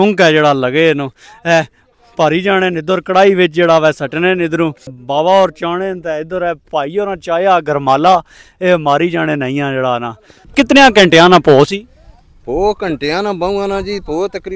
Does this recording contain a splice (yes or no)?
yes